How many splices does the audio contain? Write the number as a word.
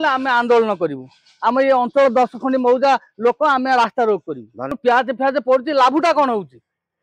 one